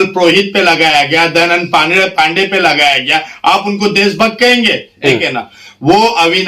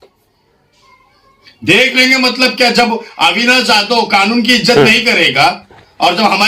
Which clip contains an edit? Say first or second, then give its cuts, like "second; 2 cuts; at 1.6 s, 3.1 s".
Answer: first; 1 cut; at 4.9 s